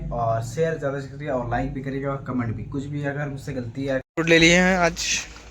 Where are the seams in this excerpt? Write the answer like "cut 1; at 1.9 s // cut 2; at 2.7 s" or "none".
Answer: cut 1; at 4.1 s